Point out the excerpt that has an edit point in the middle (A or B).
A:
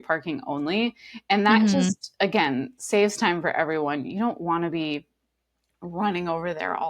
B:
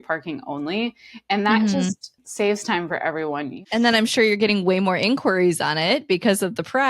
B